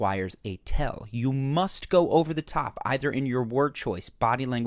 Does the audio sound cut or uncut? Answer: cut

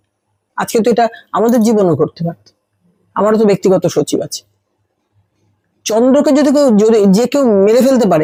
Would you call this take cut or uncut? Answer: uncut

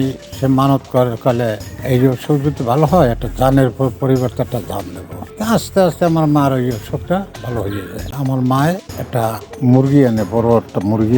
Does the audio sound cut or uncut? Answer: cut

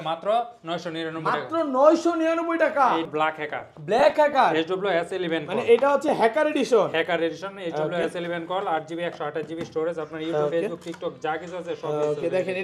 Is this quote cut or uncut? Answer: cut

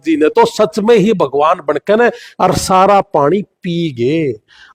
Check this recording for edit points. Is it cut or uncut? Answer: uncut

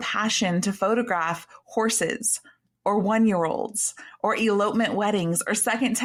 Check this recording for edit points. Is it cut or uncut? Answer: uncut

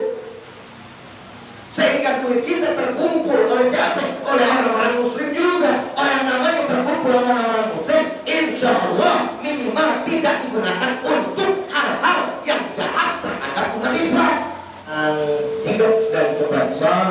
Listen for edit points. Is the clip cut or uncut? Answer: cut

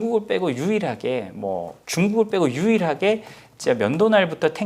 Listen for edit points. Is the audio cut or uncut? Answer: cut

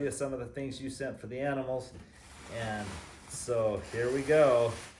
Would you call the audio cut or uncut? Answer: uncut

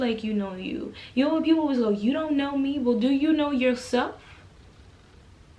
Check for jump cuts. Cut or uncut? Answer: uncut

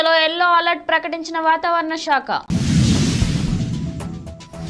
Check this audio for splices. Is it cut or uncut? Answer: cut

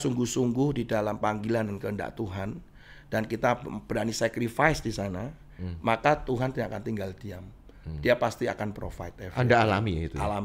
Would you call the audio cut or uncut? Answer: uncut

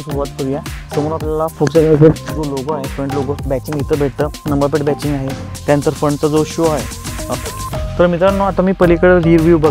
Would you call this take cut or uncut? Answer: cut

